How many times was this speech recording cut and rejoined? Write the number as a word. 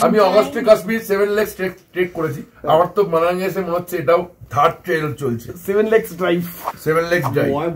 one